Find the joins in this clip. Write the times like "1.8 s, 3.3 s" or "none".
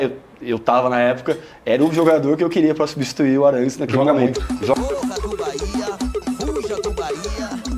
4.5 s